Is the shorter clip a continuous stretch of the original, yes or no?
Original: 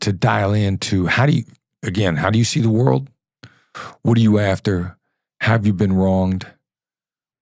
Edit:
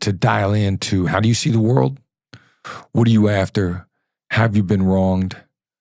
no